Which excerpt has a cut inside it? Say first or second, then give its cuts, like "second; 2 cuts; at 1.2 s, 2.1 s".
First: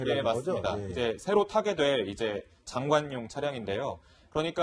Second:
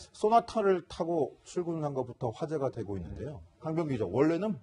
second; 1 cut; at 3.7 s